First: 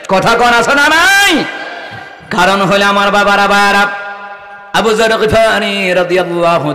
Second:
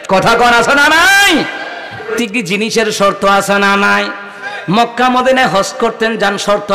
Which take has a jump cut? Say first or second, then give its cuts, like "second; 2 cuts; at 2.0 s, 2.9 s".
second; 1 cut; at 2.1 s